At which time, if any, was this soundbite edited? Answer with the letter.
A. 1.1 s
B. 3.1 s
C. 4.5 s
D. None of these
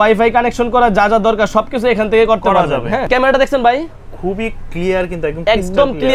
B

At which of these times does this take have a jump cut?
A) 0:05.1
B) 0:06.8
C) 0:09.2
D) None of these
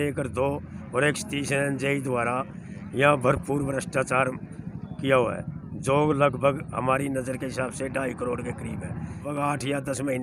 C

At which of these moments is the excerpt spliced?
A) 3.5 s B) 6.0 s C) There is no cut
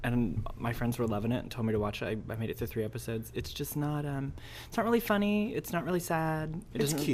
B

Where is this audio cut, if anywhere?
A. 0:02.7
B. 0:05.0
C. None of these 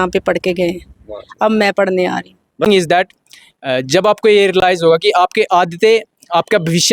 A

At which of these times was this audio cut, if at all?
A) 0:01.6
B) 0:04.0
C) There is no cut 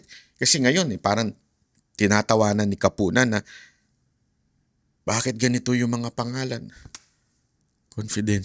C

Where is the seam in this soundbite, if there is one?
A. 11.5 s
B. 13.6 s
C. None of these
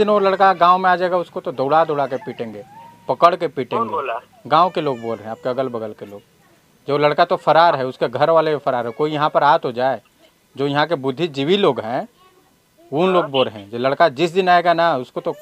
C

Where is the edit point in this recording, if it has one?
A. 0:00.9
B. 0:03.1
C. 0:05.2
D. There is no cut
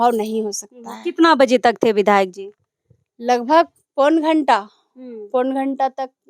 D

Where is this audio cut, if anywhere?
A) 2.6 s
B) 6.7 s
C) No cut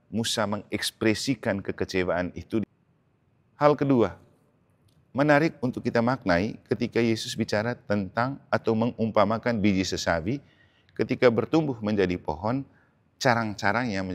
A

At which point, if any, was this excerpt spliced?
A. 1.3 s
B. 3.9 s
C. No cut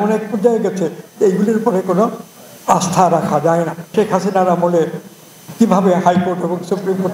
B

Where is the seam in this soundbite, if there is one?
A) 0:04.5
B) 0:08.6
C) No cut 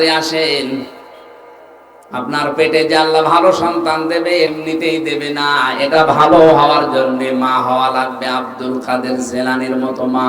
A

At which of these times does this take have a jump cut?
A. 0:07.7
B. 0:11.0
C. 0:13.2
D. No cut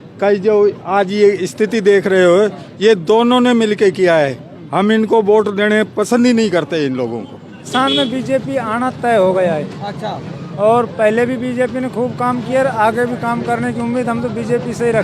A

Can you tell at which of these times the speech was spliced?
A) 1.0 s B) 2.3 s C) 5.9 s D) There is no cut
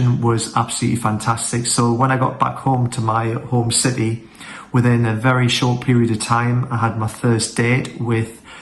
D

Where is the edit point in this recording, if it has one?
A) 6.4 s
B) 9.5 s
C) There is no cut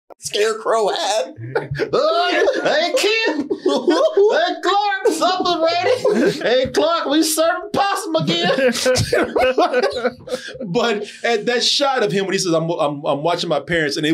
A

